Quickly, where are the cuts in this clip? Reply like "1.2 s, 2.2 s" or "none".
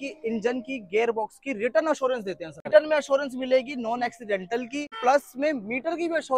2.7 s, 4.9 s

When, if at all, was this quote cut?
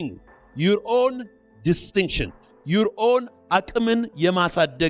none

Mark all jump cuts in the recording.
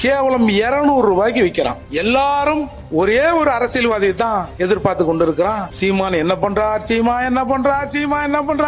1.8 s

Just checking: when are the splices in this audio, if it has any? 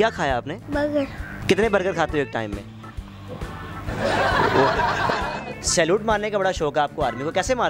1.3 s, 5.1 s

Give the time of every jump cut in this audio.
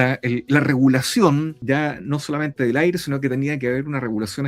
1.6 s

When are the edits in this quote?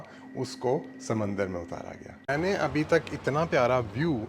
2.3 s

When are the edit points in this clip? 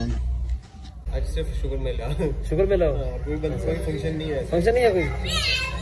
0.9 s

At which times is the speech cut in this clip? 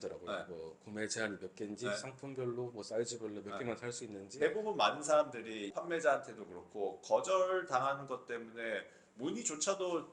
4.4 s, 5.7 s

